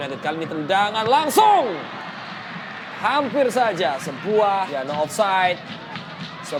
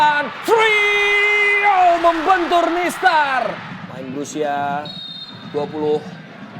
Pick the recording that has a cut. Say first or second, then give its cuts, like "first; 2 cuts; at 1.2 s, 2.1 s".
second; 1 cut; at 3.7 s